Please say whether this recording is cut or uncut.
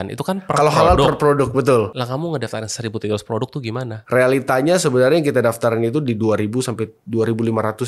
cut